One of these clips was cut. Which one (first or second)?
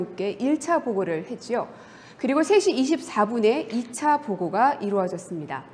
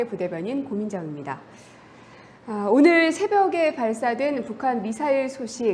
first